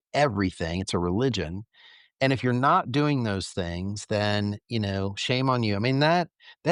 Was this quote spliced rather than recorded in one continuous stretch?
no; 0 cuts

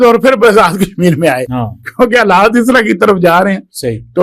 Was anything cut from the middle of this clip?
no; 0 cuts

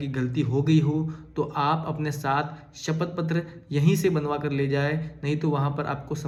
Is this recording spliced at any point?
no; 0 cuts

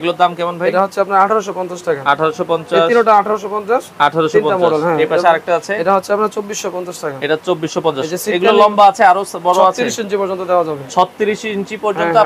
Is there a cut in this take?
no; 0 cuts

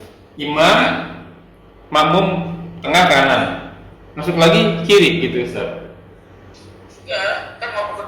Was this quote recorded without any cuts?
yes; 0 cuts

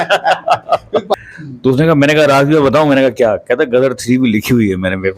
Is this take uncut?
no; 1 cut; at 1.1 s

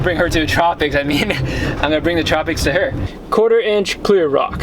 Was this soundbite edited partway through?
yes; 1 cut; at 3.1 s

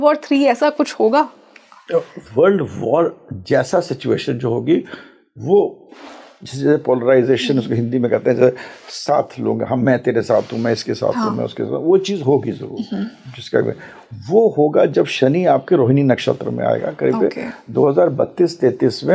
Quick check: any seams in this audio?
no; 0 cuts

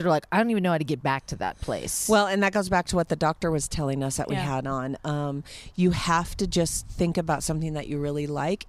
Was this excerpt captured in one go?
yes; 0 cuts

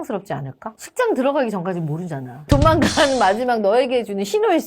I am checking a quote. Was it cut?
no; 0 cuts

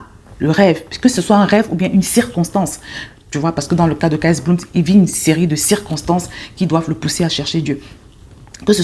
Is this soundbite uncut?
yes; 0 cuts

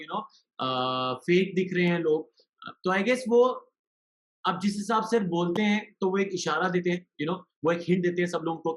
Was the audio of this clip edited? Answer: no; 0 cuts

